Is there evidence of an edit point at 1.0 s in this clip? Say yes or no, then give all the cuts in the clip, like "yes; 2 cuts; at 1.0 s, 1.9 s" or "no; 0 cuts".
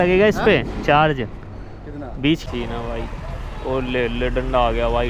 no; 1 cut; at 2.4 s